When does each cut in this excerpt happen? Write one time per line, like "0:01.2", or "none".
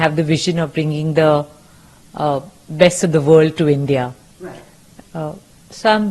none